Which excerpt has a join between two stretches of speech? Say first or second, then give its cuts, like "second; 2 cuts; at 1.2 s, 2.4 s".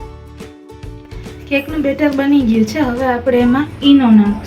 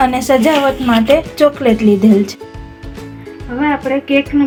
first; 1 cut; at 1.5 s